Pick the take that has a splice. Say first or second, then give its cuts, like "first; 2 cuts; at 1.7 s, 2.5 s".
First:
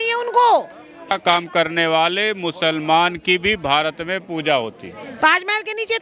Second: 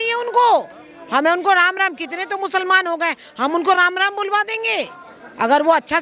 first; 2 cuts; at 1.1 s, 5.1 s